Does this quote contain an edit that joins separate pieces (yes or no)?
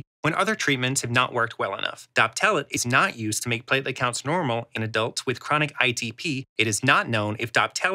yes